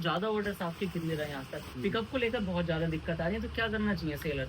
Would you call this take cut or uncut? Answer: cut